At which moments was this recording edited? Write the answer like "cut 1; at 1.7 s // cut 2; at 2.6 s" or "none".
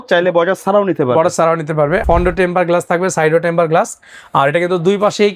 cut 1; at 2.0 s